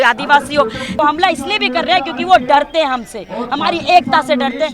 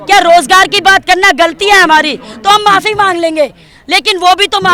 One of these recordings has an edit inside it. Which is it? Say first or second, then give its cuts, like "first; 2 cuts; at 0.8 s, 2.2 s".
first; 1 cut; at 1.0 s